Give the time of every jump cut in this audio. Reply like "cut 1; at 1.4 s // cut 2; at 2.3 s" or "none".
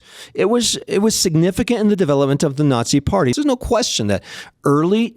cut 1; at 3.3 s